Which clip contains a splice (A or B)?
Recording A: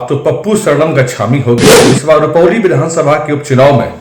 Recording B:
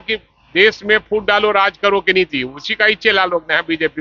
A